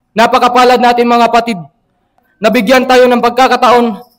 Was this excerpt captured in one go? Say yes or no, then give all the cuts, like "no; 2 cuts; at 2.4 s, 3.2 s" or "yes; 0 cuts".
no; 1 cut; at 2.1 s